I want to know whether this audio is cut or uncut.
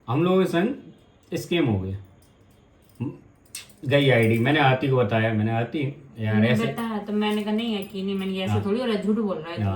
uncut